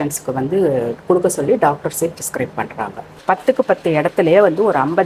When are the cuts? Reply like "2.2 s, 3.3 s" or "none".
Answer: 3.1 s